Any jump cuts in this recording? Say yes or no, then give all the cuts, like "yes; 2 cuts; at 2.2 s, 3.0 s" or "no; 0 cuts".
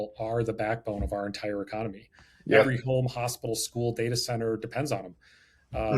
no; 0 cuts